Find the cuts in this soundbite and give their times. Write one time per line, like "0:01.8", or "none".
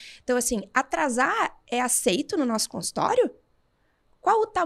none